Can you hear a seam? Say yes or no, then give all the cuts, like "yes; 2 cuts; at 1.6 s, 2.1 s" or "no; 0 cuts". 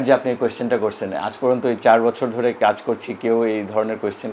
no; 0 cuts